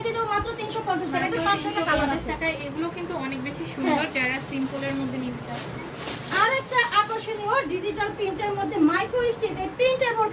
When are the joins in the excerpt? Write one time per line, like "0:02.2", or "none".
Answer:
none